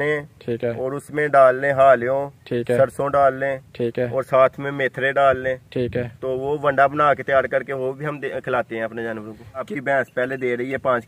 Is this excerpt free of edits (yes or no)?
no